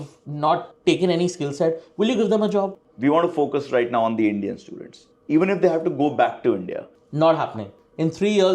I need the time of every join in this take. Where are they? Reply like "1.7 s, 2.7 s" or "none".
2.8 s, 5.1 s, 6.9 s

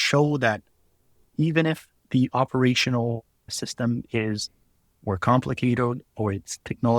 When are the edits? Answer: 1.9 s, 3.5 s

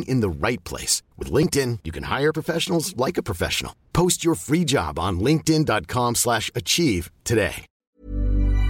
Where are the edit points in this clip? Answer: 7.8 s

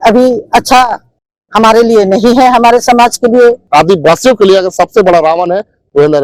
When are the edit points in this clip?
3.6 s

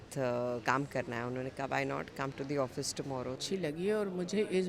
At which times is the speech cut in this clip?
3.4 s

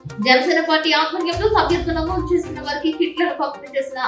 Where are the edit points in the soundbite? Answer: none

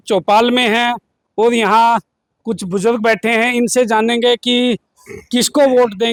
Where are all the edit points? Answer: none

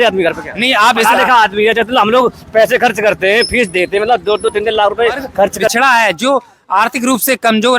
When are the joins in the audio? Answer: 5.7 s

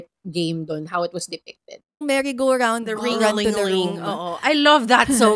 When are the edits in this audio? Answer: 2.0 s

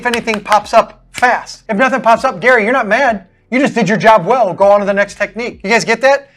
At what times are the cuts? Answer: 1.5 s, 5.5 s

